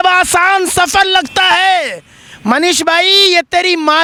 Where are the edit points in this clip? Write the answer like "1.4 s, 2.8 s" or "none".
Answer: none